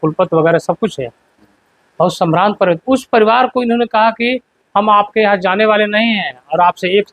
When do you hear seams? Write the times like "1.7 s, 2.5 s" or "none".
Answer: none